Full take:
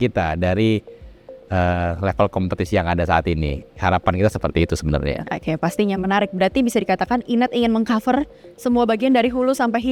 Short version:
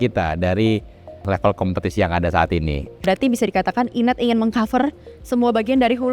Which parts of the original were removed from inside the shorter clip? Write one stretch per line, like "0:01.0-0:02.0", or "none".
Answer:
0:01.2-0:02.0
0:03.7-0:06.3